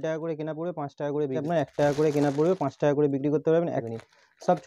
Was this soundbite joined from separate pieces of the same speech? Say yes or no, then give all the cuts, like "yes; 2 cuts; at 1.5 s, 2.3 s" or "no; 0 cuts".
yes; 2 cuts; at 1.4 s, 3.8 s